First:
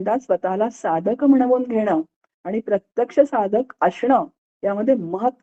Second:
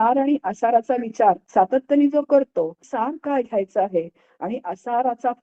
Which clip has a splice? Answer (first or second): second